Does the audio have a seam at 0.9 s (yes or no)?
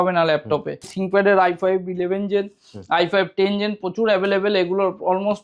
yes